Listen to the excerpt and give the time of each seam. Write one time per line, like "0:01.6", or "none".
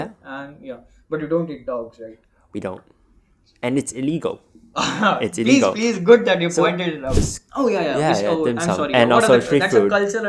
0:07.2